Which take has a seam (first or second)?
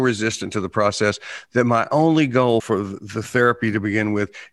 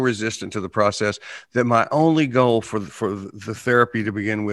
first